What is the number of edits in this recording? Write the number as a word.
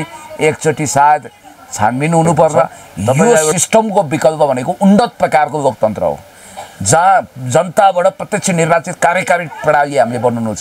one